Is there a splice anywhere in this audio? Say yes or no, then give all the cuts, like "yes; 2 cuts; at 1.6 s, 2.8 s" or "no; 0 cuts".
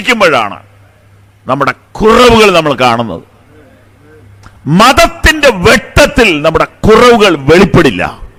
no; 0 cuts